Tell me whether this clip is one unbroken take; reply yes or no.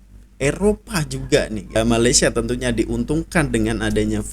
no